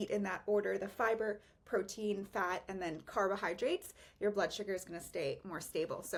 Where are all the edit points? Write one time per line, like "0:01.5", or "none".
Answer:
none